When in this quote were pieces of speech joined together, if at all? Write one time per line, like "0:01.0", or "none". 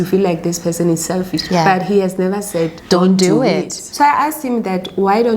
0:03.8